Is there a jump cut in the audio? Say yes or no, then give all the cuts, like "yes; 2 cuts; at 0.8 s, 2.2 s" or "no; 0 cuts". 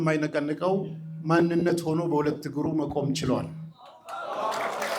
no; 0 cuts